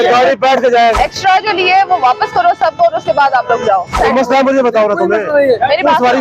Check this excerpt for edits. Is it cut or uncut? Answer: cut